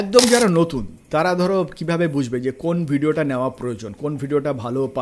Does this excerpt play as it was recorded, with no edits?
yes; 0 cuts

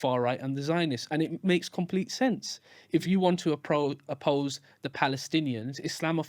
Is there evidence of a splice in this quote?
no; 0 cuts

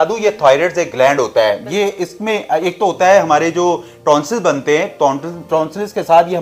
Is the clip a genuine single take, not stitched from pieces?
yes; 0 cuts

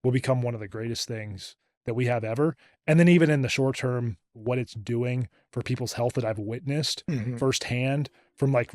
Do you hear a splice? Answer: yes; 1 cut; at 4.3 s

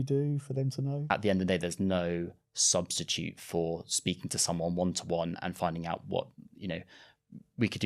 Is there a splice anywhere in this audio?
yes; 1 cut; at 1.0 s

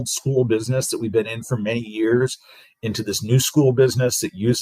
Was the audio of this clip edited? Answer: no; 0 cuts

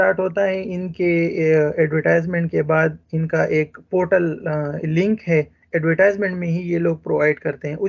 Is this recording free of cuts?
yes; 0 cuts

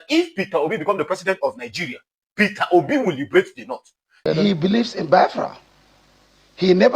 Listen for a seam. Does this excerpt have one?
yes; 1 cut; at 4.2 s

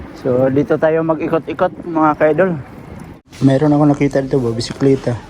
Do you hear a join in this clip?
yes; 1 cut; at 3.3 s

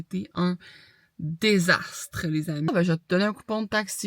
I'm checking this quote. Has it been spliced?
yes; 1 cut; at 2.7 s

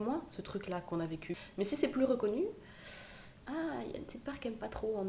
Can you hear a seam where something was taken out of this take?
yes; 1 cut; at 1.3 s

